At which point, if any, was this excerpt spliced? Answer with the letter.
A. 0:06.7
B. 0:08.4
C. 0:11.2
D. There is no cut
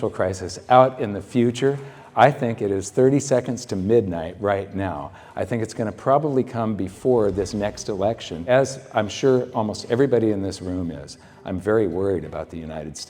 B